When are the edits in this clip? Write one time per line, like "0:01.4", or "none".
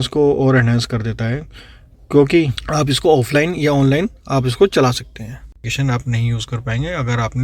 0:02.6
0:05.7